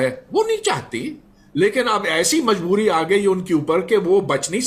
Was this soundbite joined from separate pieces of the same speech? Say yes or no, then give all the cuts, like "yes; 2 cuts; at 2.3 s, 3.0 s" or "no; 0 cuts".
no; 0 cuts